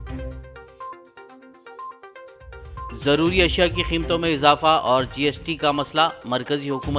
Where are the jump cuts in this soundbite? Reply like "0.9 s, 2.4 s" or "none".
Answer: 1.8 s